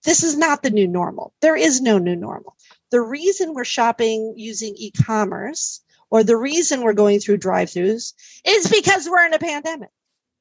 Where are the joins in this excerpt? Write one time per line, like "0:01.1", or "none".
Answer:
0:02.6